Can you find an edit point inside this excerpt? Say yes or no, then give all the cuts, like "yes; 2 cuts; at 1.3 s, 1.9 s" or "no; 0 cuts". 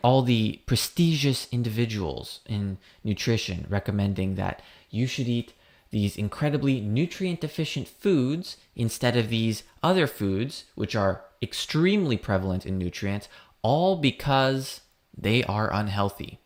no; 0 cuts